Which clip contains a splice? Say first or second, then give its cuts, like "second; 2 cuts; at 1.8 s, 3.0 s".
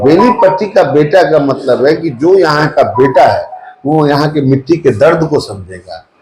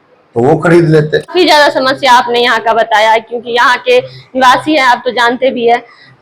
second; 1 cut; at 1.3 s